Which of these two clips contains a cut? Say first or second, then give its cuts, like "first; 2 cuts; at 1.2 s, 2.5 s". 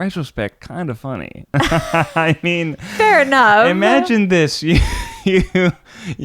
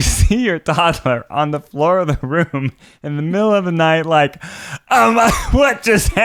first; 1 cut; at 1.5 s